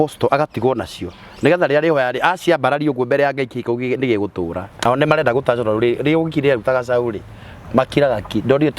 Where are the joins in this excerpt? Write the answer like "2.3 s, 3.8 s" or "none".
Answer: 4.7 s